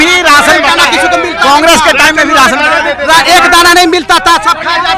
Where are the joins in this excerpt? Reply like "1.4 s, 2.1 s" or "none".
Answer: none